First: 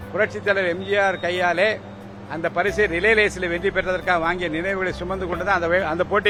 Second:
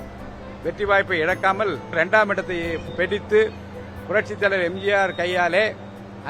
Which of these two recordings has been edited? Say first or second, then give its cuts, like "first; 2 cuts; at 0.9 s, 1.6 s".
second; 1 cut; at 2.0 s